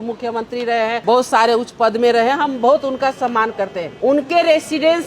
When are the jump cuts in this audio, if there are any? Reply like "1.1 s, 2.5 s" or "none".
1.0 s, 3.8 s